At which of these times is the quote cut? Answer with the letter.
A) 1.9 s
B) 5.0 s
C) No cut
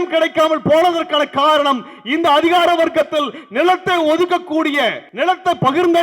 B